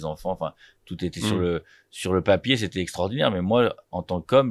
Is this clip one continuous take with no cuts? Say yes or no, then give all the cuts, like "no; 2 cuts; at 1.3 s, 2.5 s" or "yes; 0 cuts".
yes; 0 cuts